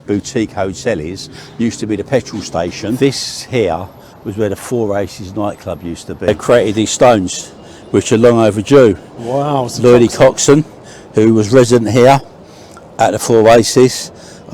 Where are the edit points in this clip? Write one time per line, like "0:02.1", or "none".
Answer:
0:03.0
0:06.3